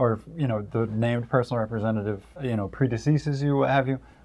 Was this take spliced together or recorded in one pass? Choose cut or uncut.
cut